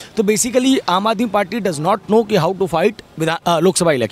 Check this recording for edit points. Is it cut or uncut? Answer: uncut